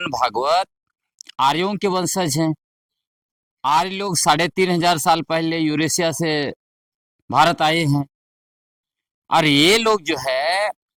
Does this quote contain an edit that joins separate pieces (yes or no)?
no